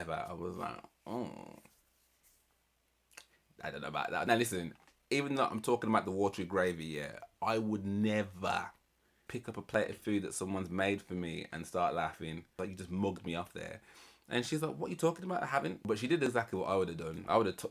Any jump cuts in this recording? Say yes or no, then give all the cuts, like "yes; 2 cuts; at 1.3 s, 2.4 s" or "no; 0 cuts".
yes; 4 cuts; at 4.3 s, 9.2 s, 12.6 s, 15.8 s